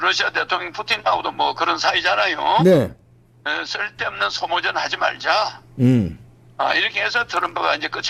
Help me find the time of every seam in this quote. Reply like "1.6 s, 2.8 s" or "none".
none